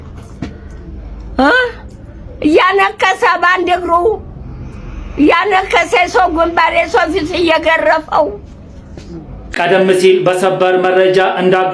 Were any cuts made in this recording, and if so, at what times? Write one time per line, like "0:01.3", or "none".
0:09.6